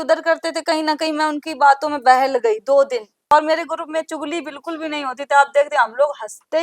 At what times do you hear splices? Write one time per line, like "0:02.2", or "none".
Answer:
0:03.3